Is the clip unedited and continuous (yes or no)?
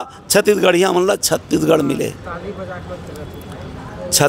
yes